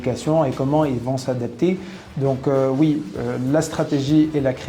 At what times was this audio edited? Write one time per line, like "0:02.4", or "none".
none